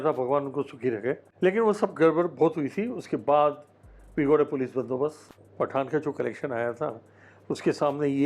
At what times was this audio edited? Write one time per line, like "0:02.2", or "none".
0:01.3
0:05.3